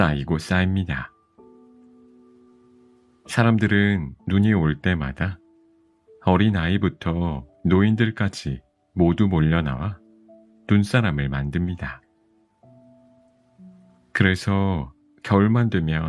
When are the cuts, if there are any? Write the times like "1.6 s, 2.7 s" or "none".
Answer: 1.2 s, 3.2 s